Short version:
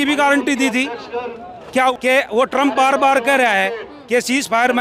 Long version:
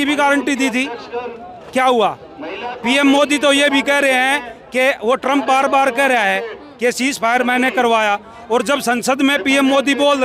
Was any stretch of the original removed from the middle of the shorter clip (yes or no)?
yes